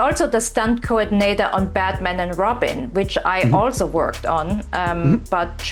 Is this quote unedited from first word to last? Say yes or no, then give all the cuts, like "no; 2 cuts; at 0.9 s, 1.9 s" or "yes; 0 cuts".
yes; 0 cuts